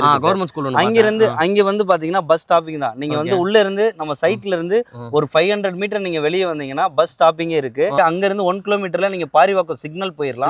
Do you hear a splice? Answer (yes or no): yes